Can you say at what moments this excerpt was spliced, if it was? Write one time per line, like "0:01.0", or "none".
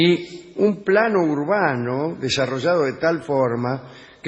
0:01.2